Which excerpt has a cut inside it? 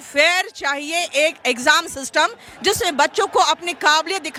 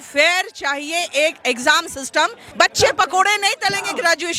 second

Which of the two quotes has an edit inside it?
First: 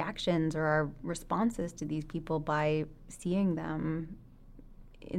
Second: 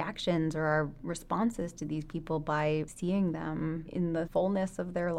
second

